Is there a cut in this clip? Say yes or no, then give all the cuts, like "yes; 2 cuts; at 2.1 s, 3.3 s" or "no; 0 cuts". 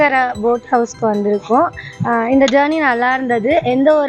no; 0 cuts